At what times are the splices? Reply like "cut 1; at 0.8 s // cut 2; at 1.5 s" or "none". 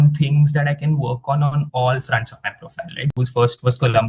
cut 1; at 3.1 s